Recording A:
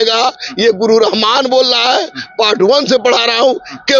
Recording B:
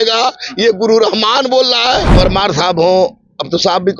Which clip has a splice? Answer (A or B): B